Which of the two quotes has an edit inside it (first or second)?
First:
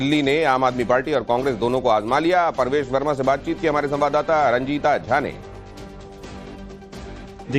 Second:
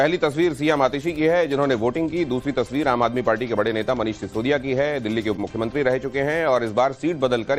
first